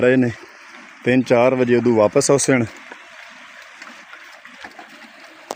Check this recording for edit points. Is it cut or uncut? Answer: uncut